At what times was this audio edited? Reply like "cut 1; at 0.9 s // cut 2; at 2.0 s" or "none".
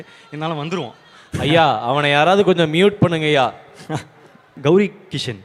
cut 1; at 4.4 s